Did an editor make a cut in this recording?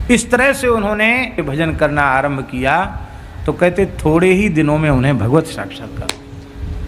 yes; 1 cut; at 1.4 s

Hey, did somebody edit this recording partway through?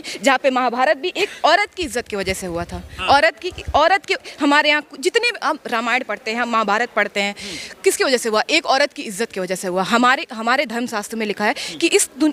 no; 0 cuts

